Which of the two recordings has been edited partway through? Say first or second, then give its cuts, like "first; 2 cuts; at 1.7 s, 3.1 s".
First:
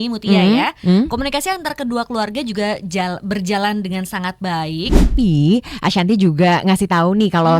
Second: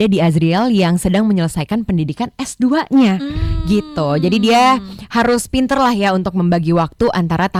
first; 1 cut; at 5.1 s